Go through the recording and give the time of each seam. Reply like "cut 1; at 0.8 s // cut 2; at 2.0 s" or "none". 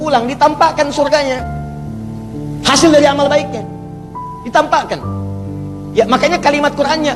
none